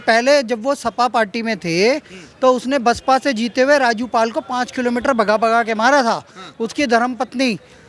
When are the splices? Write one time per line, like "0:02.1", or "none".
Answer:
none